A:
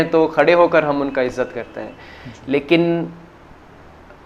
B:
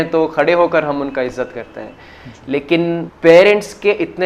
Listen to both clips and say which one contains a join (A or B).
B